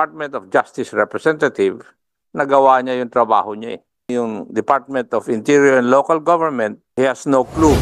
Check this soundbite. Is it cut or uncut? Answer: cut